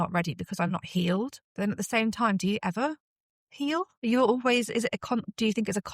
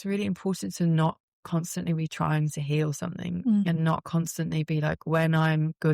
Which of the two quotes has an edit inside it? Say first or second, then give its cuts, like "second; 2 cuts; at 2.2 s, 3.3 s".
first; 2 cuts; at 1.4 s, 3.9 s